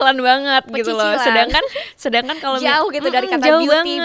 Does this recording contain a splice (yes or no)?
no